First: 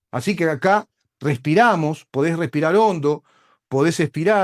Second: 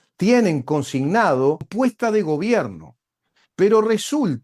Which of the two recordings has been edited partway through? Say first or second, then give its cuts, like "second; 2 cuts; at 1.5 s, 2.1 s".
second; 1 cut; at 1.7 s